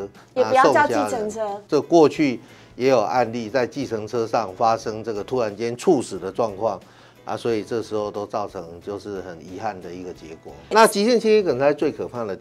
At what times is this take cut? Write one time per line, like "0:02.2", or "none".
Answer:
0:01.5
0:10.7

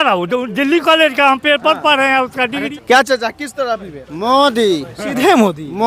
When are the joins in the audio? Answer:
0:02.7

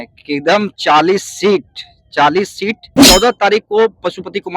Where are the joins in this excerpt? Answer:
0:03.0

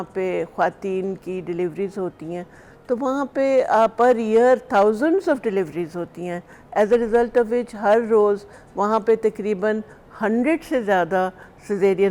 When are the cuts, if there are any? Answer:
none

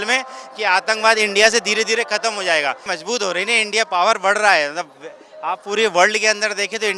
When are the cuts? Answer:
0:02.9

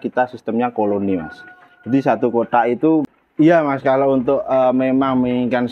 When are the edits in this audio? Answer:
0:03.1

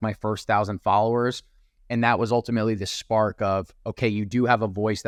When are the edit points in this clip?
none

